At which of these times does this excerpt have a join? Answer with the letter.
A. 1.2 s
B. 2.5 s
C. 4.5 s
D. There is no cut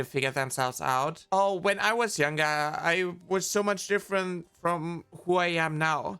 A